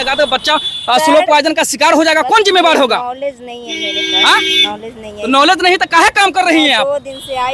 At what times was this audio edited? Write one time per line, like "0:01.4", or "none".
none